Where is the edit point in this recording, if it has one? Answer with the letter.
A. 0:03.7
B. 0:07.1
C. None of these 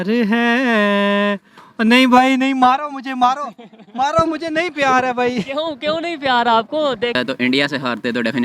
B